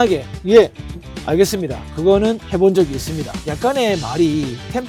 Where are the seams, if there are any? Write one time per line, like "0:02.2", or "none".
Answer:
none